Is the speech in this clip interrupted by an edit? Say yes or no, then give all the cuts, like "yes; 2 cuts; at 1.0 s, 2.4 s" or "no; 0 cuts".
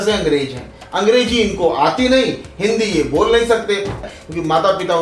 yes; 1 cut; at 4.1 s